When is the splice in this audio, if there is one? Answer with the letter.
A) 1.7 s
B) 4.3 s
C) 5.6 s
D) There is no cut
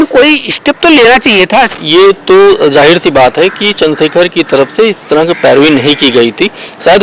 A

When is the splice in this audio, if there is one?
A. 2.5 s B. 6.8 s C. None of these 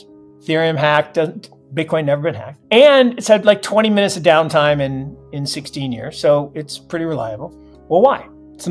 A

